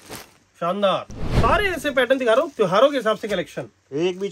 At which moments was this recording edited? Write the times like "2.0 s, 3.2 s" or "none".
1.2 s, 2.5 s